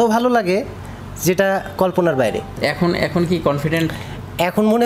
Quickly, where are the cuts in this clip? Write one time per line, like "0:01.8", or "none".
0:02.6